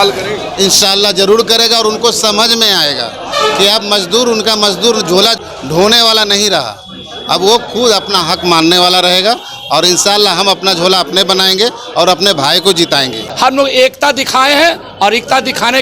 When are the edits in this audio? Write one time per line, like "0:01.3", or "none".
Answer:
0:05.4
0:12.9